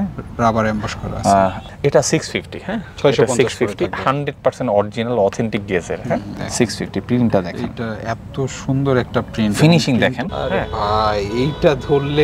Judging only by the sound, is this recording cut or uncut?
cut